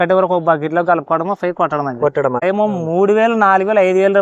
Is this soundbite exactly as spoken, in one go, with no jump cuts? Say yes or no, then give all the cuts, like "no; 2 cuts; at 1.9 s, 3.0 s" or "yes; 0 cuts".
no; 1 cut; at 2.4 s